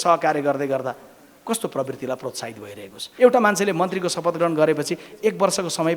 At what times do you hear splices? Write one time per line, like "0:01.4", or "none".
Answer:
0:03.0